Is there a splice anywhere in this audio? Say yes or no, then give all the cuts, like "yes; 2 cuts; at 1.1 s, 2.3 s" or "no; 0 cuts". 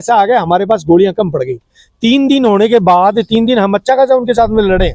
no; 0 cuts